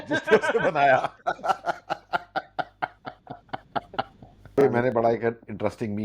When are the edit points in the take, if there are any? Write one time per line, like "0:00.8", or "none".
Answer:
0:04.6